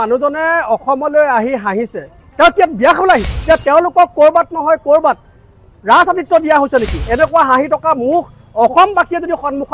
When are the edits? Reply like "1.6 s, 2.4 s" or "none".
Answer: 3.3 s, 7.0 s